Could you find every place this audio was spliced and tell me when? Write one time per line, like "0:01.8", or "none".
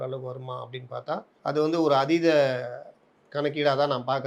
0:01.3